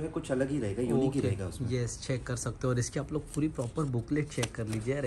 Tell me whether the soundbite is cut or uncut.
uncut